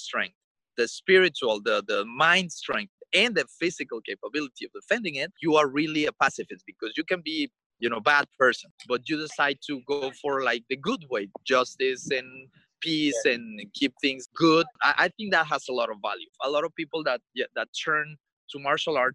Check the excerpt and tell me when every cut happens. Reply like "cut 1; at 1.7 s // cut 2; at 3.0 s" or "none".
cut 1; at 5.4 s // cut 2; at 7.6 s // cut 3; at 8.7 s // cut 4; at 14.2 s // cut 5; at 14.9 s // cut 6; at 16.3 s